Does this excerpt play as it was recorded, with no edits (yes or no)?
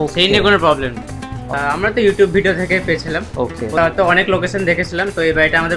no